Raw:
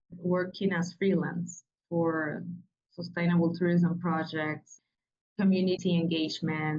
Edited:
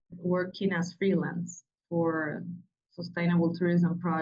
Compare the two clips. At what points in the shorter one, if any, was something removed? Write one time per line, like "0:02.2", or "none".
none